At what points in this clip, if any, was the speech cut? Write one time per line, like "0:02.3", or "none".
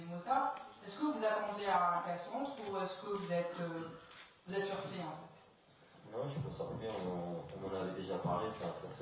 0:05.5